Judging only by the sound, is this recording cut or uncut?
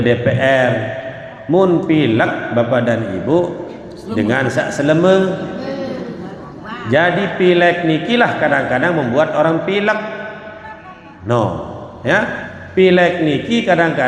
uncut